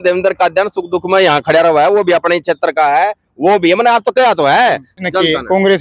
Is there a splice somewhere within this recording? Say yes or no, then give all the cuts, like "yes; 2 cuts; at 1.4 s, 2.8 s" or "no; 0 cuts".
yes; 1 cut; at 4.9 s